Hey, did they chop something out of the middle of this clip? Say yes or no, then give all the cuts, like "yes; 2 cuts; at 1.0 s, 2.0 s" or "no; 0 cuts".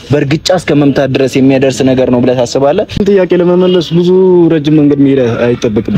yes; 1 cut; at 3.0 s